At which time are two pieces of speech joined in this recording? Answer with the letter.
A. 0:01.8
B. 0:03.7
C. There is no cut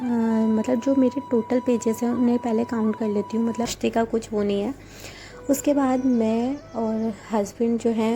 B